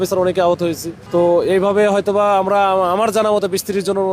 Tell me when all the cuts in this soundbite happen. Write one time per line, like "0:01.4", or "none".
0:00.9